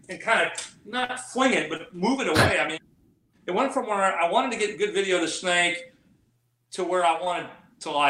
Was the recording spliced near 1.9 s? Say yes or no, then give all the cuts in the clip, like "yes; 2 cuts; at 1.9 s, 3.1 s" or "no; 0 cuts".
no; 1 cut; at 3.2 s